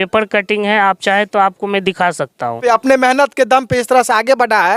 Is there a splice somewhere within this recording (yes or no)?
yes